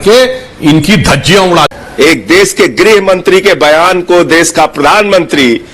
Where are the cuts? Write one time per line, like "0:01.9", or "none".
0:01.7